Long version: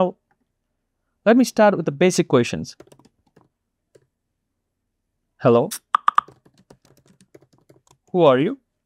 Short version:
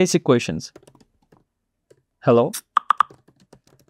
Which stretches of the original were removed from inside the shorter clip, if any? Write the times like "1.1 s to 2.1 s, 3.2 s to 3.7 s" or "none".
4.1 s to 5.3 s